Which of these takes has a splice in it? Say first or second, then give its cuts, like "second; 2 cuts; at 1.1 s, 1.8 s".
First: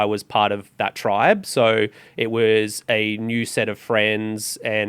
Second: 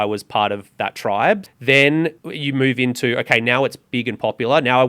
second; 2 cuts; at 1.5 s, 2.3 s